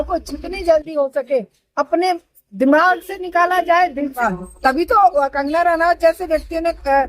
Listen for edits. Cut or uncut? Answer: cut